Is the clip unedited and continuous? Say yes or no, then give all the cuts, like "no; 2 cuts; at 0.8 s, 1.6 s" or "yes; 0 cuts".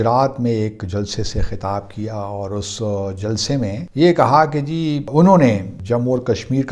no; 3 cuts; at 3.8 s, 5.1 s, 5.7 s